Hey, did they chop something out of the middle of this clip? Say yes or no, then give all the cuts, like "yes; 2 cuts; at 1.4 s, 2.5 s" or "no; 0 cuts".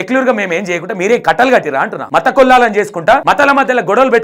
yes; 2 cuts; at 2.0 s, 3.2 s